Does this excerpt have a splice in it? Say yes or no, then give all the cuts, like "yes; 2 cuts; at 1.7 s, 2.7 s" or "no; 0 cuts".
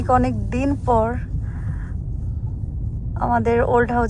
no; 0 cuts